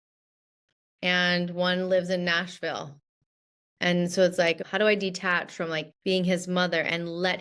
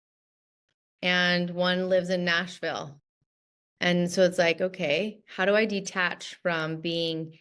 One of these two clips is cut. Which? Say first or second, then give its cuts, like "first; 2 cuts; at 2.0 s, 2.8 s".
first; 2 cuts; at 4.6 s, 5.9 s